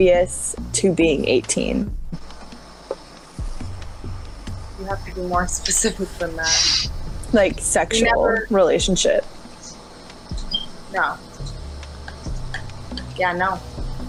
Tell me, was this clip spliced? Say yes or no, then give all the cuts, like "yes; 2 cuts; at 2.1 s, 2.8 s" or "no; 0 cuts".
no; 0 cuts